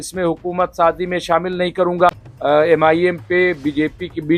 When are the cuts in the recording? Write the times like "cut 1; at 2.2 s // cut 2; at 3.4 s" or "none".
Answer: cut 1; at 2.3 s